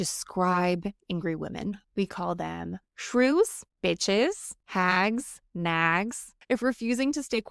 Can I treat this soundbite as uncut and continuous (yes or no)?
no